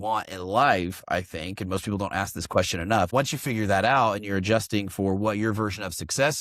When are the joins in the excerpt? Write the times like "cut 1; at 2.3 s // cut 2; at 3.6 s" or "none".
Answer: cut 1; at 3.1 s